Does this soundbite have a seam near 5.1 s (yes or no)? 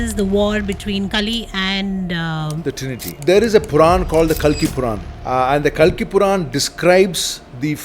yes